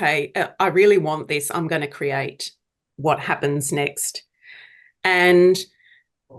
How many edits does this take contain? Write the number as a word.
zero